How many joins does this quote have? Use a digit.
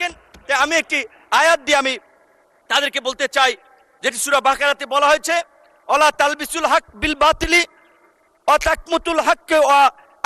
0